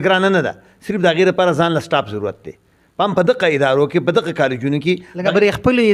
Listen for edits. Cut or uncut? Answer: uncut